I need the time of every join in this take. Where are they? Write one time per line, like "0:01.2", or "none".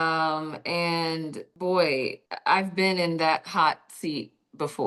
0:01.4
0:02.3